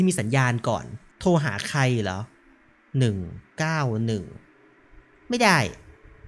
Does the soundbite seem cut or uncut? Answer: uncut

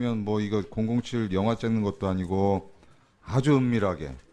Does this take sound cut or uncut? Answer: uncut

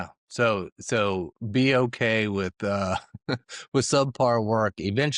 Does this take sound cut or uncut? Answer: uncut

